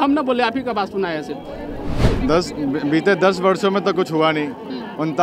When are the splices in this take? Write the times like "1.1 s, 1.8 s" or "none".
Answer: 2.1 s